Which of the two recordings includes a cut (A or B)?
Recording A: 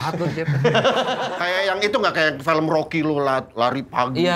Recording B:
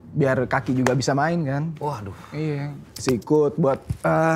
A